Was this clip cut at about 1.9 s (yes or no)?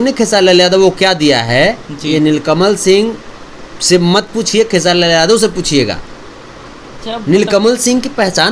no